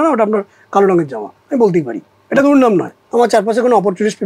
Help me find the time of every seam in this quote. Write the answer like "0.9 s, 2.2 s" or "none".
3.0 s